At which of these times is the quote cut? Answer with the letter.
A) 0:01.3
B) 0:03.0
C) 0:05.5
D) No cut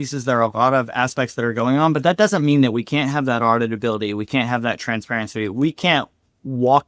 D